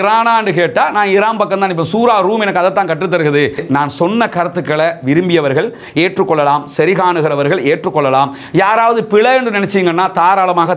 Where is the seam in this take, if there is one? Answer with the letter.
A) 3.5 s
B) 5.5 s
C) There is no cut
A